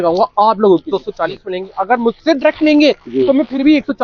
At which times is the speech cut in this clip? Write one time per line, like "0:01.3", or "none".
0:00.9